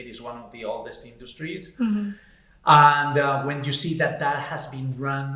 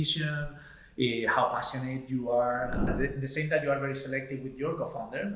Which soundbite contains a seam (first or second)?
second